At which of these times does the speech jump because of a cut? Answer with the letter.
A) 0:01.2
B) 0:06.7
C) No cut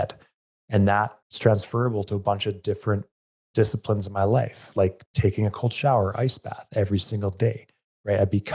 A